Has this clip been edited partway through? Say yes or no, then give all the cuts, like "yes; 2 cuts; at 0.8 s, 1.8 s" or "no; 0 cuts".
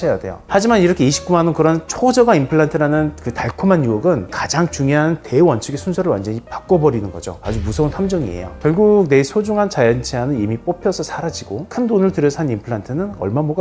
yes; 1 cut; at 8.5 s